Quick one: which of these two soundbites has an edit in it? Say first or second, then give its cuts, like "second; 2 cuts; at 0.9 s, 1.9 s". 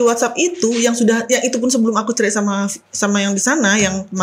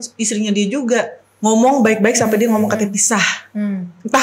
second; 1 cut; at 1.2 s